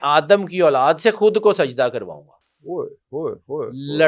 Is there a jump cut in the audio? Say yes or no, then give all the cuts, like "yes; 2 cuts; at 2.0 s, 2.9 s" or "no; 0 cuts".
no; 0 cuts